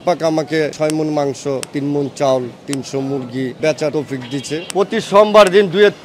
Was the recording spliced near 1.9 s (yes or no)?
no